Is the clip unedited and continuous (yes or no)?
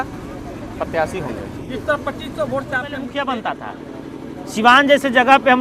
no